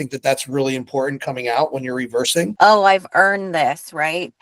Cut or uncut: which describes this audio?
cut